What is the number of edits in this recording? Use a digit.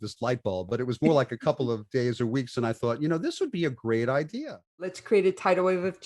1